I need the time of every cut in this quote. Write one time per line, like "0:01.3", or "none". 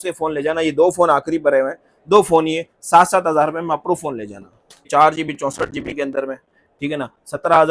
0:04.8